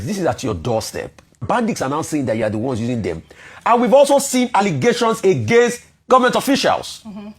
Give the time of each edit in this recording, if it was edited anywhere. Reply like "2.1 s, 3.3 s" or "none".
1.4 s